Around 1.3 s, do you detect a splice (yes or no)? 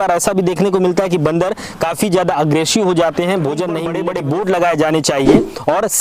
no